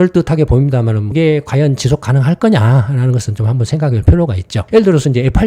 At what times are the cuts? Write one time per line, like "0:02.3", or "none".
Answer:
0:01.0
0:04.5